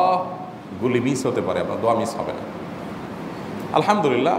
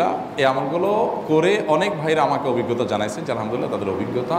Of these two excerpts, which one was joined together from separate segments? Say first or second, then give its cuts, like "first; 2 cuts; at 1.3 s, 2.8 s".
first; 1 cut; at 3.1 s